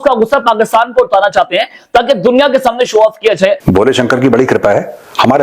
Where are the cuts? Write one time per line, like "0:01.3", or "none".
0:03.6